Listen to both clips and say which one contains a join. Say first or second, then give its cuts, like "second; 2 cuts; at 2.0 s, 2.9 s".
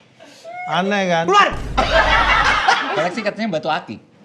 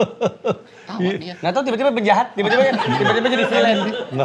first; 1 cut; at 2.9 s